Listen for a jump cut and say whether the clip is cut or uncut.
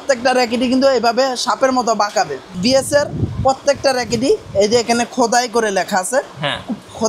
cut